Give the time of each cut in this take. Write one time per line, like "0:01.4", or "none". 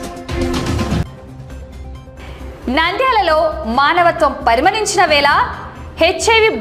0:01.0